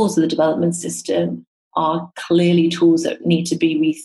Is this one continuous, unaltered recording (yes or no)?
yes